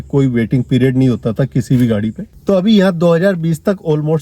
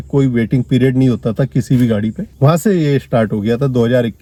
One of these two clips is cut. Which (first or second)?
first